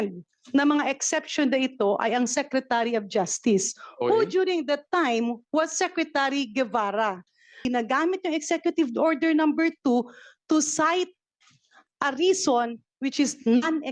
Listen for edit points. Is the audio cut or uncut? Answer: cut